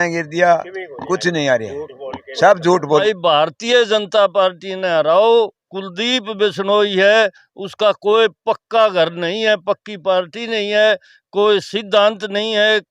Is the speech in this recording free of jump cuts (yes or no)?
no